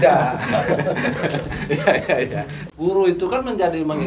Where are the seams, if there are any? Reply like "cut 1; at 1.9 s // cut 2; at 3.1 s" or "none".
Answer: cut 1; at 2.6 s

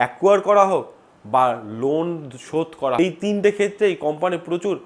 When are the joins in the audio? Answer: cut 1; at 3.0 s

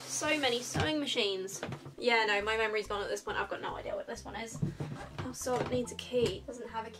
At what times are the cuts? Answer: none

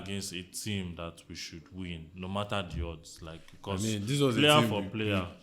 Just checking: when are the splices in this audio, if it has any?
none

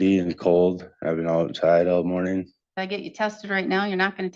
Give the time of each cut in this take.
none

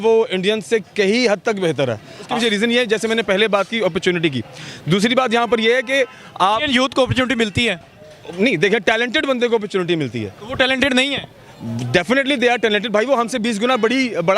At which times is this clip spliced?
cut 1; at 2.2 s

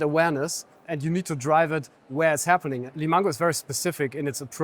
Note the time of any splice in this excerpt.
cut 1; at 0.9 s // cut 2; at 2.8 s

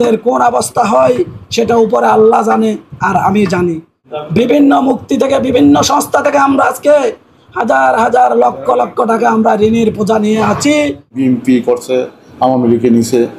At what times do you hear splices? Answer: cut 1; at 4.0 s // cut 2; at 11.2 s

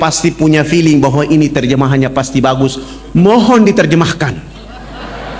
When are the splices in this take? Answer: none

